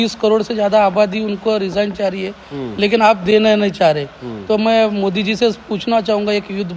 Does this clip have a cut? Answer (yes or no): no